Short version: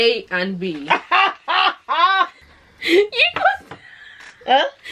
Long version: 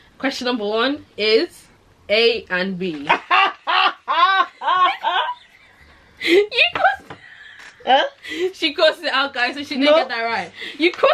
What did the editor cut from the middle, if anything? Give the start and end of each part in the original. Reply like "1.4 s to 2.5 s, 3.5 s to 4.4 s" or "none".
4.6 s to 5.8 s